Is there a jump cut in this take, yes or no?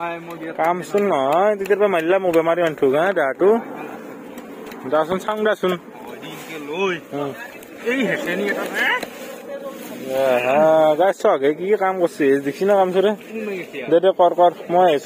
no